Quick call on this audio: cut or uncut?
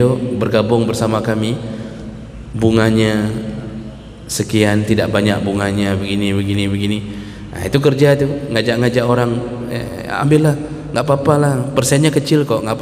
uncut